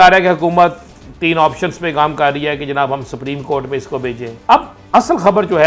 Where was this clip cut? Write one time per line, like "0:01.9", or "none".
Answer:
0:04.3